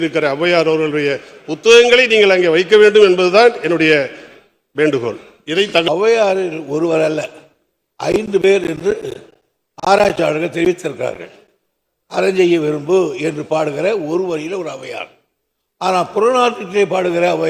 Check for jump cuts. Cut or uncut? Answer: cut